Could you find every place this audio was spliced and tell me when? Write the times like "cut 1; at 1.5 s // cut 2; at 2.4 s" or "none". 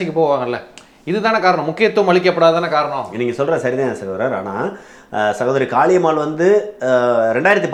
none